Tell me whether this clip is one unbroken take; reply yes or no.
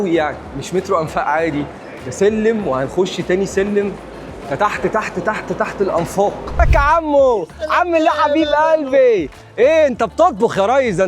no